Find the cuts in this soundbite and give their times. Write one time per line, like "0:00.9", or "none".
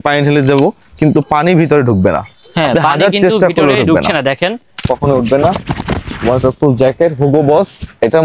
0:04.9